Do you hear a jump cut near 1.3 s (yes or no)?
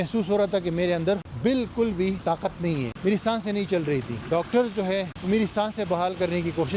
yes